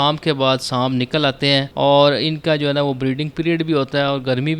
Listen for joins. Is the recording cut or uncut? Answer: cut